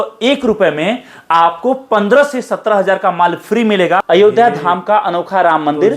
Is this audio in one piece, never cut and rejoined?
no; 1 cut; at 4.0 s

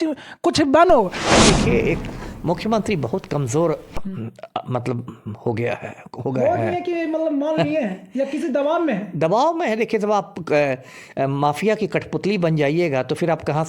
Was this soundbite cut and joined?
yes; 1 cut; at 1.3 s

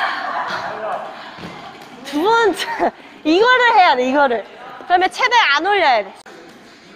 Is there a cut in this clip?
yes; 2 cuts; at 0.9 s, 6.2 s

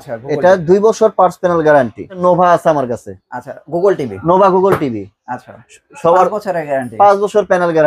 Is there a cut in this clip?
yes; 1 cut; at 2.1 s

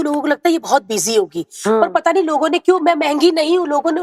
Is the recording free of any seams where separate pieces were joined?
yes; 0 cuts

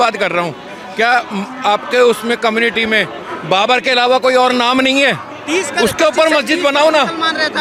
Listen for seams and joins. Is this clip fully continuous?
yes; 0 cuts

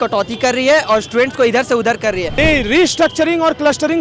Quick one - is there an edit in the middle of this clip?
yes; 1 cut; at 2.3 s

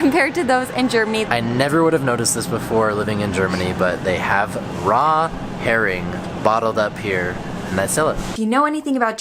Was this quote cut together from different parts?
yes; 2 cuts; at 1.3 s, 8.3 s

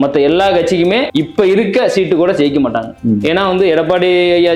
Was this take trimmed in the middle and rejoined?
yes; 1 cut; at 1.1 s

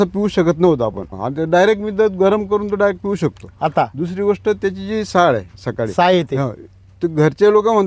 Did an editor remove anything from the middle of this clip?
yes; 1 cut; at 1.0 s

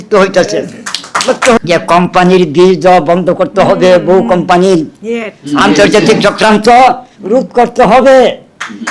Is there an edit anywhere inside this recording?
yes; 1 cut; at 1.6 s

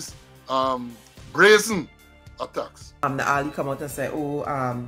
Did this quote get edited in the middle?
yes; 1 cut; at 3.0 s

